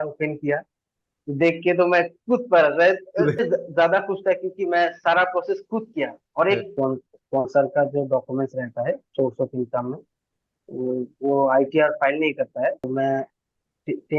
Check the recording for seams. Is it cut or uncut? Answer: cut